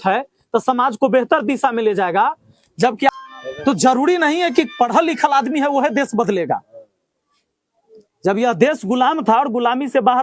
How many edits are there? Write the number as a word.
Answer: one